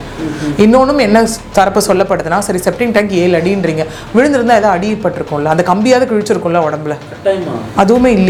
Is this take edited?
no; 0 cuts

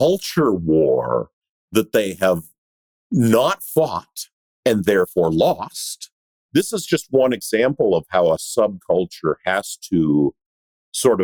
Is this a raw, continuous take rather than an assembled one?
no; 1 cut; at 6.4 s

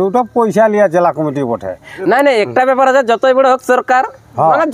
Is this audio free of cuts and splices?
no; 1 cut; at 1.9 s

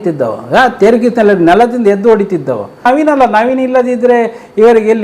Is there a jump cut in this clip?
yes; 1 cut; at 2.8 s

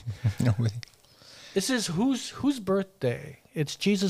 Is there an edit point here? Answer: no; 0 cuts

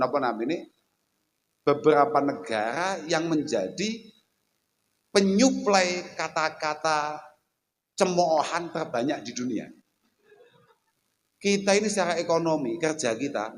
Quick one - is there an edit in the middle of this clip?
yes; 1 cut; at 10.7 s

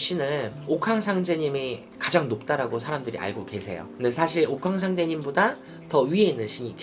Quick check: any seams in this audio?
no; 0 cuts

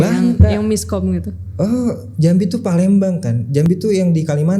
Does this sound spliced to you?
no; 0 cuts

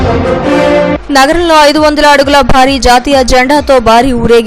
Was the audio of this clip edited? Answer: yes; 1 cut; at 1.0 s

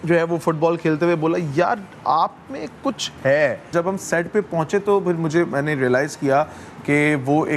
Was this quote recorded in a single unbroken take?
no; 1 cut; at 3.6 s

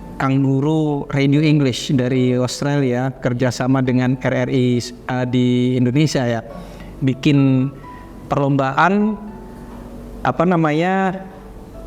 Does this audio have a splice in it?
no; 0 cuts

